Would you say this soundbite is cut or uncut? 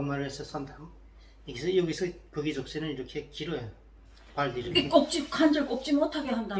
uncut